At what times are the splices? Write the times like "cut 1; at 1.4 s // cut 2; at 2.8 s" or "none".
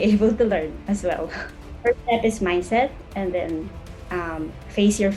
cut 1; at 1.7 s